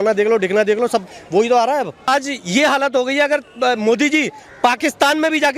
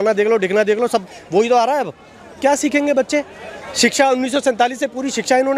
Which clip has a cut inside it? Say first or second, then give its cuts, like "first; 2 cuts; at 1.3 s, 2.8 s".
first; 1 cut; at 2.1 s